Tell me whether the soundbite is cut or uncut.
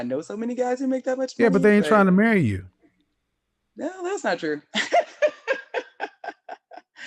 cut